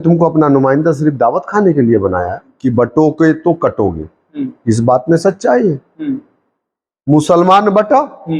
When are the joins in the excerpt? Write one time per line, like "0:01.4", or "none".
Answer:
0:02.5